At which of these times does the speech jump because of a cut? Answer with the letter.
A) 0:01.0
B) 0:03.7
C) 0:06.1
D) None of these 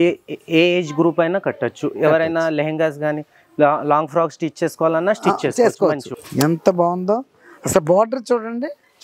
C